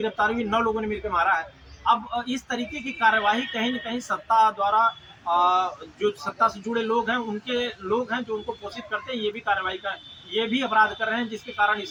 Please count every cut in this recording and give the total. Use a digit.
0